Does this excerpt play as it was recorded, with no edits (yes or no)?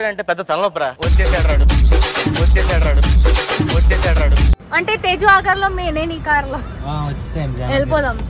yes